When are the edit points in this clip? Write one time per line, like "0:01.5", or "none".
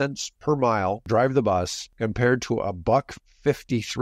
0:01.0
0:01.8